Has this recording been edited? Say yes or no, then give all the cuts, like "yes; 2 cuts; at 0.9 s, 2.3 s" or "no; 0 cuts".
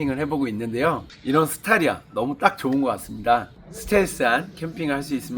yes; 2 cuts; at 1.1 s, 3.6 s